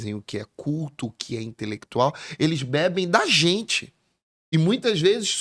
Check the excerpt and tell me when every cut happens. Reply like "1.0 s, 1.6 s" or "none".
none